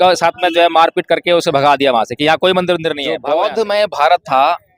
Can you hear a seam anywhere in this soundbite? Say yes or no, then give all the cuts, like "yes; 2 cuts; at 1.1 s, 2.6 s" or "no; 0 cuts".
yes; 1 cut; at 3.2 s